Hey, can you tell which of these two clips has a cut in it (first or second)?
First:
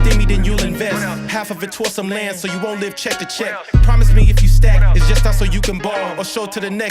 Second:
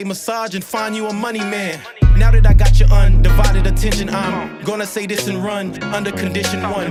first